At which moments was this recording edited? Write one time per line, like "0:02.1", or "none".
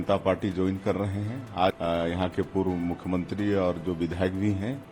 0:01.8